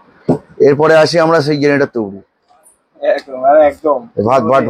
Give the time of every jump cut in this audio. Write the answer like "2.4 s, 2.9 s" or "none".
none